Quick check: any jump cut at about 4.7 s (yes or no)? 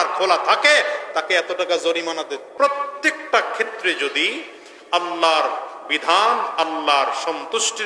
no